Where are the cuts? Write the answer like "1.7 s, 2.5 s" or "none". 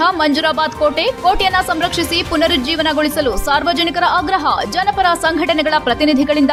none

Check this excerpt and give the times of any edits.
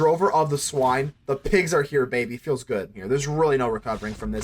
2.9 s

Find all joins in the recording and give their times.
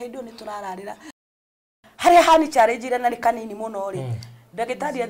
1.4 s

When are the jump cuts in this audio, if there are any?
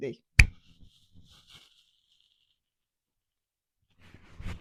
none

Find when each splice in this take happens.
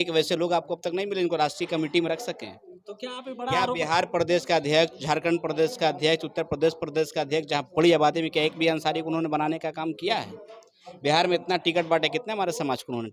none

